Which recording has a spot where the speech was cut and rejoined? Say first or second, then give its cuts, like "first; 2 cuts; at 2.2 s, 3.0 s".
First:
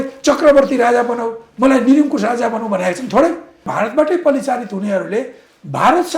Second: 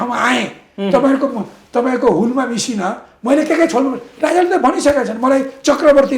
first; 1 cut; at 3.6 s